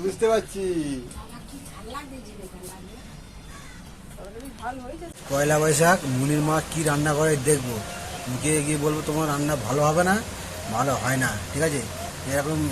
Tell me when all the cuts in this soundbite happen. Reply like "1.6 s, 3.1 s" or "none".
5.2 s